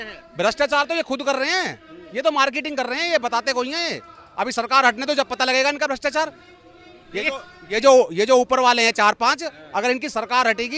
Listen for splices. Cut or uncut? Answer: uncut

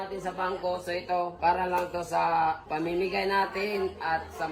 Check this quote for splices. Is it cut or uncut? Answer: cut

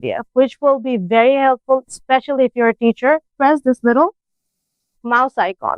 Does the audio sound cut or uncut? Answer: cut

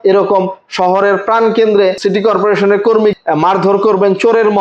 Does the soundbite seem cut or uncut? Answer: cut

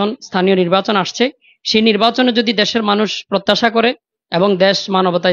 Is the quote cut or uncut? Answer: uncut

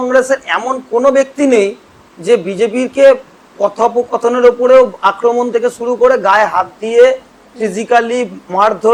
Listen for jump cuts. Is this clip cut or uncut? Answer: uncut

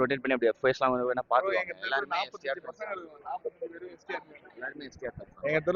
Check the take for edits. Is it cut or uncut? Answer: uncut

